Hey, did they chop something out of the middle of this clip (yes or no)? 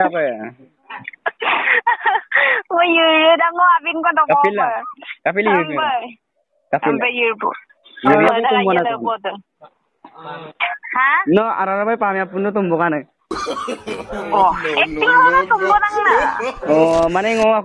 yes